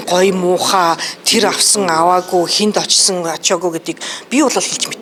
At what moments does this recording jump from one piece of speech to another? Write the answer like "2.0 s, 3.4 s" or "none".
none